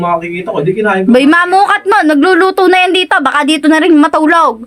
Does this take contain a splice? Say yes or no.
no